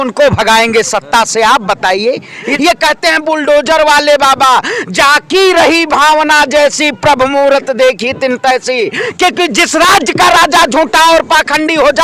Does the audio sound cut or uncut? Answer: cut